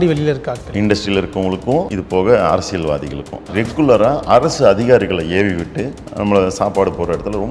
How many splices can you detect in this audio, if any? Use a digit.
2